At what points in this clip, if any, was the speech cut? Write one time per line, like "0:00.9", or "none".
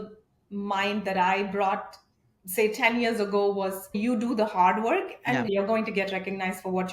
0:03.9
0:05.5

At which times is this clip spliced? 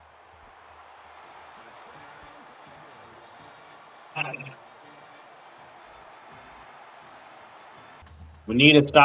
0:08.0

